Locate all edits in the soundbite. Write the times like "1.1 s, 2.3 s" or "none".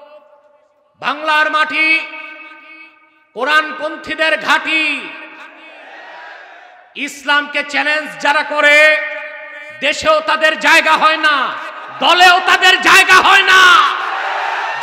none